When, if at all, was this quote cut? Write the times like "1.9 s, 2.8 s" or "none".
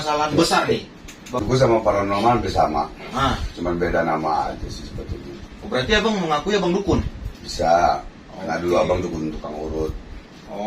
1.3 s